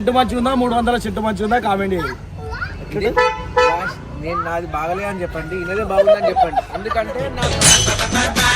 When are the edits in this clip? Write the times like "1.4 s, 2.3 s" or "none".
none